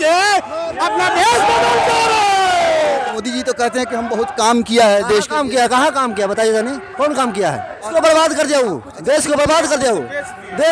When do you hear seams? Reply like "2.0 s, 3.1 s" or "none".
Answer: 3.1 s, 7.9 s